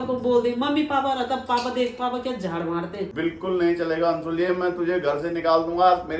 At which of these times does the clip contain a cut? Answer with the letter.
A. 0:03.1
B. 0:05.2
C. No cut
A